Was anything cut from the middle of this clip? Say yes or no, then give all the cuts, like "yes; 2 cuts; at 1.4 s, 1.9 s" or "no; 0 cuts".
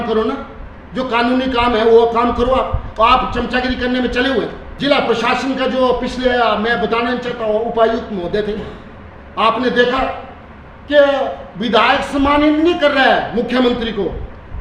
yes; 1 cut; at 4.7 s